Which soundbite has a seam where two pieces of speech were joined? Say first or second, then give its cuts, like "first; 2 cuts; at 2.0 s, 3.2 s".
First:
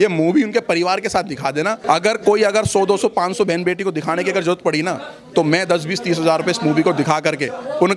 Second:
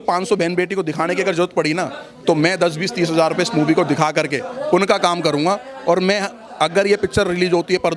first; 1 cut; at 1.8 s